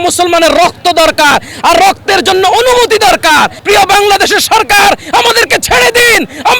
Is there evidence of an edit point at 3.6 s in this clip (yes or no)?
yes